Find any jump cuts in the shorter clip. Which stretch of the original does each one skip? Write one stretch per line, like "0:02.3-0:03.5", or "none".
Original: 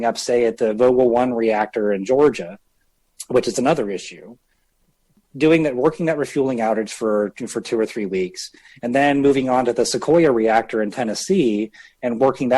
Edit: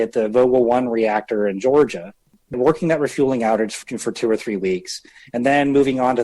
0:03.0-0:05.7
0:07.0-0:07.3